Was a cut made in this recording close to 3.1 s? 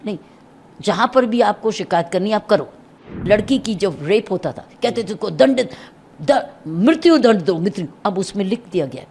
yes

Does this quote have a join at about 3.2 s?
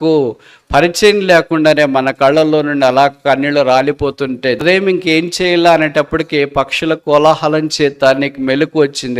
no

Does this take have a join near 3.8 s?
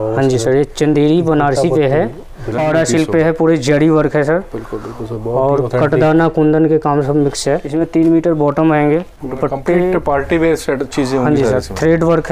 no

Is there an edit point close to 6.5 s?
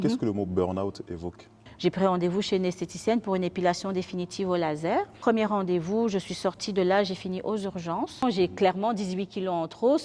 no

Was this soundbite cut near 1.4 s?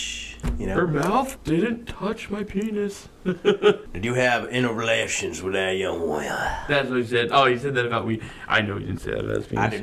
yes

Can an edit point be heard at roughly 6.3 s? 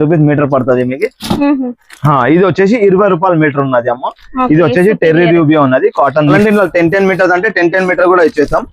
yes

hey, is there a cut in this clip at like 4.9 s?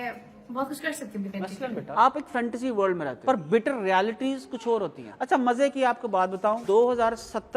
no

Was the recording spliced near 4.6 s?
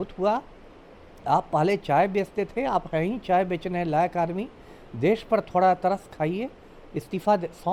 no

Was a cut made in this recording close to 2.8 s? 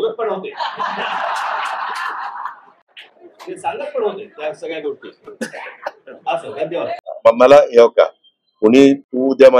no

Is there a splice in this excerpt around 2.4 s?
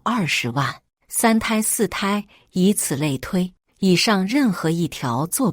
no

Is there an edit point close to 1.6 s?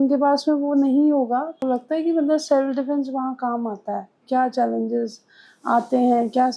yes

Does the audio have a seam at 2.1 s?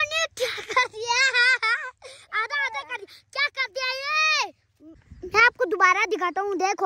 no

